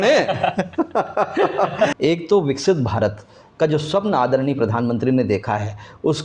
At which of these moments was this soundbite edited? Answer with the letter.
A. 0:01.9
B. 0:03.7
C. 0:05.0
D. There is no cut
A